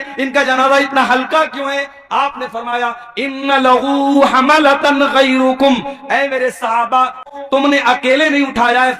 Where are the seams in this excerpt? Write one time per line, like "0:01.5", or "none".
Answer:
0:07.3